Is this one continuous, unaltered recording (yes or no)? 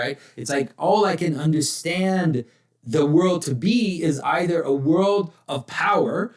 yes